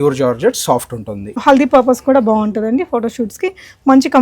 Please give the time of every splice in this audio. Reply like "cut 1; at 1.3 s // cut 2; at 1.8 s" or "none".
cut 1; at 1.4 s